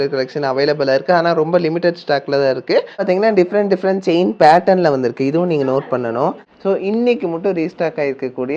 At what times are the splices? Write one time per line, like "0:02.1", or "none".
0:03.0
0:06.5